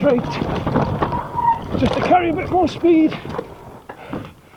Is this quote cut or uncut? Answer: uncut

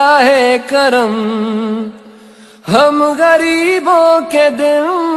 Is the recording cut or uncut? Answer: uncut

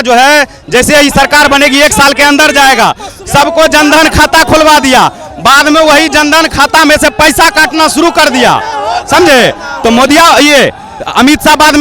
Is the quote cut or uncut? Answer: uncut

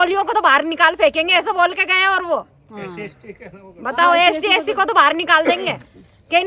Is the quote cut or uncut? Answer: uncut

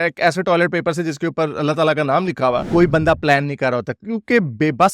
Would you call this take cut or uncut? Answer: cut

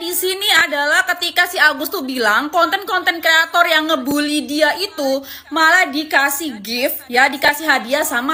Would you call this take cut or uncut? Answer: uncut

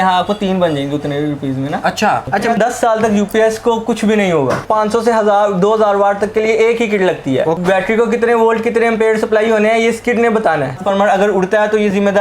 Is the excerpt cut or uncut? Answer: cut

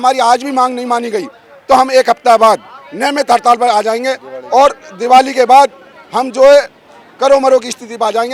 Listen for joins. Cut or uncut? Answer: uncut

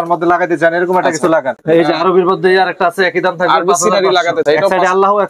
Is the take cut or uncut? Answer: cut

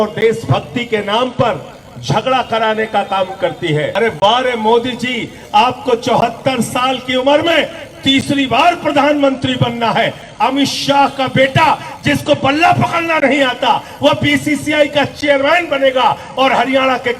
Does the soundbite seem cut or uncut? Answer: cut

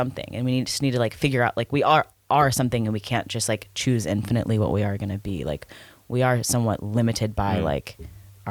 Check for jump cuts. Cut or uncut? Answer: uncut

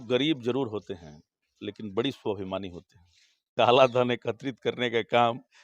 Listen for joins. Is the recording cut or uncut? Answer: cut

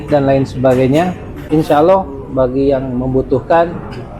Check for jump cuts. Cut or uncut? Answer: cut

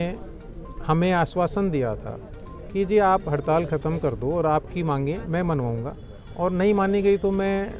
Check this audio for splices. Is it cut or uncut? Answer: uncut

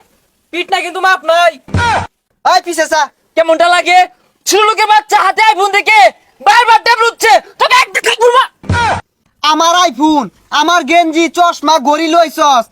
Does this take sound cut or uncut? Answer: cut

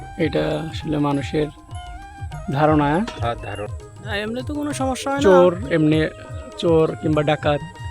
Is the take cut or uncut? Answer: cut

